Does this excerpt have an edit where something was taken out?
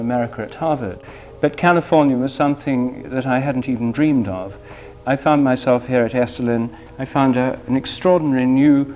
yes; 2 cuts; at 1.2 s, 3.0 s

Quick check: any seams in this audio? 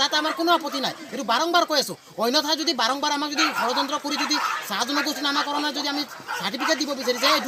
no; 0 cuts

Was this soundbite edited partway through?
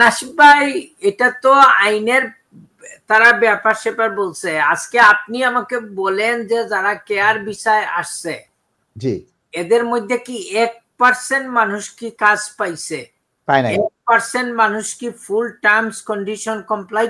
no; 0 cuts

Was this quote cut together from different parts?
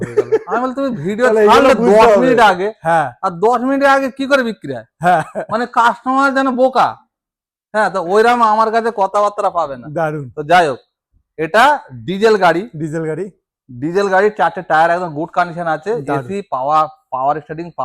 no; 0 cuts

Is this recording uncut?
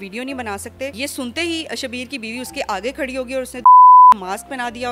no; 1 cut; at 0.9 s

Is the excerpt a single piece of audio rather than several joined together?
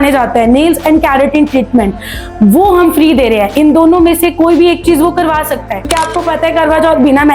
no; 1 cut; at 5.9 s

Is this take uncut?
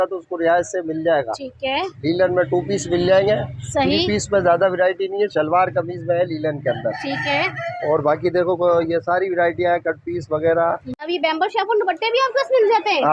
no; 1 cut; at 10.9 s

